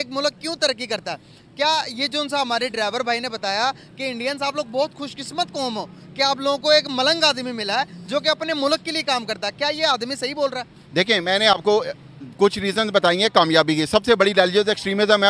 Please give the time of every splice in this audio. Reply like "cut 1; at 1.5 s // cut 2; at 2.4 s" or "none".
none